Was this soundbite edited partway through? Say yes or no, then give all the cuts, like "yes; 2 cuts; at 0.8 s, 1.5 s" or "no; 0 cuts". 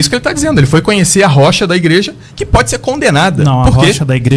no; 0 cuts